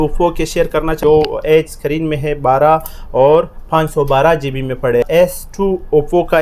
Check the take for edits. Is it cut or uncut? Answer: cut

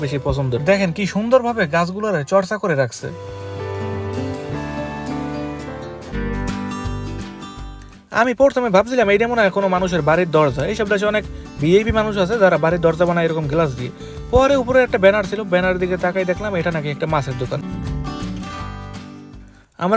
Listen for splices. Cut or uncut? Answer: cut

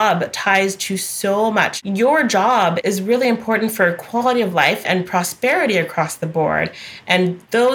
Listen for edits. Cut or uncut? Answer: cut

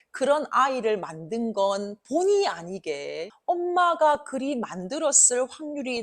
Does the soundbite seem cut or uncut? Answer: cut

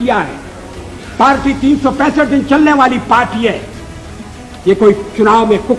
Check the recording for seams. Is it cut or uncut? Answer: uncut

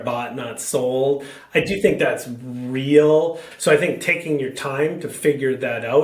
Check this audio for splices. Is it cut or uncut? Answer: cut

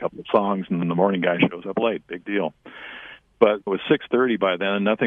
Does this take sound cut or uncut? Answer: cut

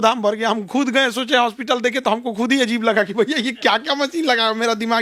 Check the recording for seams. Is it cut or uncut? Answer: uncut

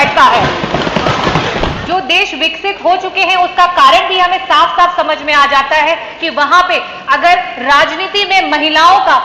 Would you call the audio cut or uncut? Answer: cut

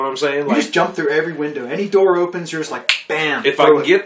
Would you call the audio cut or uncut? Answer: uncut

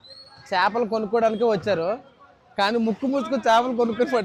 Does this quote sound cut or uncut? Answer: uncut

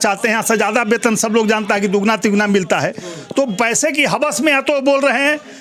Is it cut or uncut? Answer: uncut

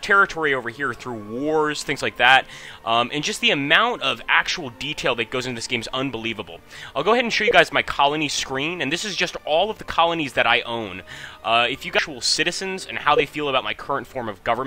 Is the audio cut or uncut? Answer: cut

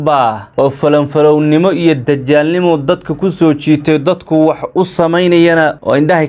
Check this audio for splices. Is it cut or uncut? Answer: uncut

